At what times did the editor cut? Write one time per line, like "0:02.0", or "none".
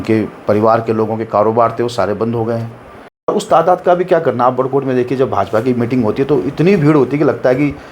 0:03.3